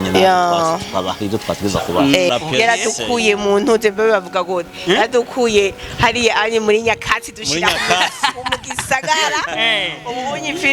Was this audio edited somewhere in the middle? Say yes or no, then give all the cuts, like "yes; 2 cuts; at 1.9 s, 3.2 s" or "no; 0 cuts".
yes; 1 cut; at 2.3 s